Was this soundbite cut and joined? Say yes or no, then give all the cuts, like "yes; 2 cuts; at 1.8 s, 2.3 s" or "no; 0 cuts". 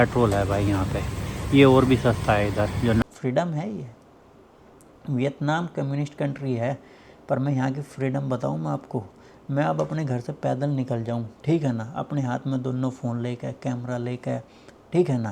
yes; 1 cut; at 3.0 s